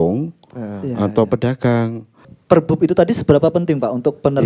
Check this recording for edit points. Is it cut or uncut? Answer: cut